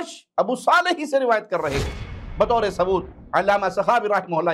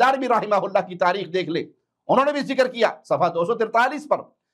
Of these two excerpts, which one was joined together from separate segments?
first; 1 cut; at 2.2 s

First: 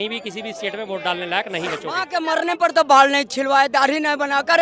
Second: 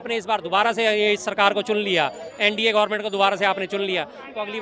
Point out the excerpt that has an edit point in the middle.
first; 1 cut; at 2.1 s

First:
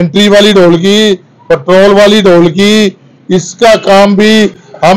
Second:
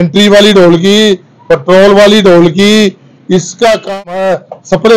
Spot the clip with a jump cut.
second; 1 cut; at 4.0 s

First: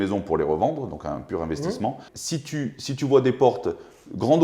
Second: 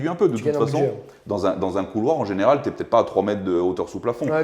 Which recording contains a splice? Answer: first; 1 cut; at 2.1 s

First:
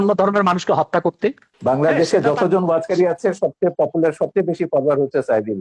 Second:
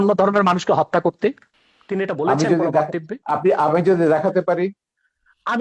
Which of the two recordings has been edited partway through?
first; 1 cut; at 1.5 s

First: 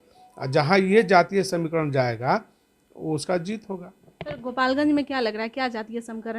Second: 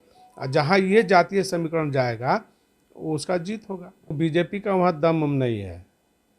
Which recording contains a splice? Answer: second; 1 cut; at 4.2 s

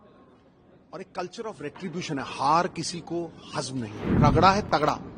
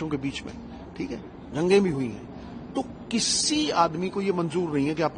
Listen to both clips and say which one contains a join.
first; 1 cut; at 4.1 s

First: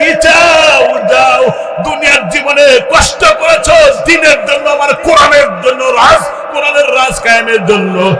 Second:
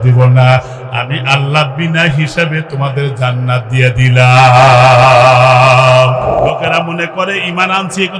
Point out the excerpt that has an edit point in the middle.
second; 1 cut; at 6.4 s

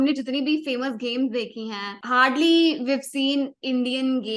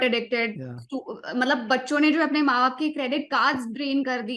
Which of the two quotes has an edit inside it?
first; 1 cut; at 1.9 s

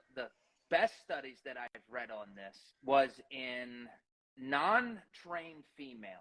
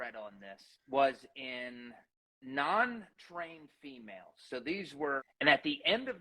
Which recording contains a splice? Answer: second; 1 cut; at 5.2 s

